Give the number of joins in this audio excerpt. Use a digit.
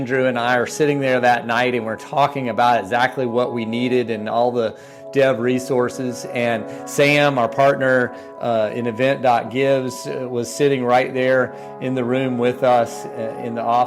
0